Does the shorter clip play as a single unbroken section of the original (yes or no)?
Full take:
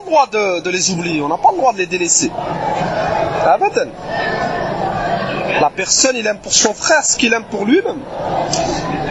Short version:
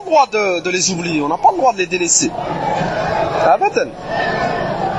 yes